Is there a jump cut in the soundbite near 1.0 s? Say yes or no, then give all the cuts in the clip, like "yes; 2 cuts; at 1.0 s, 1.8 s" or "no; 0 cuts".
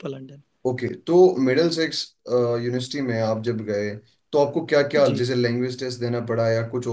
no; 0 cuts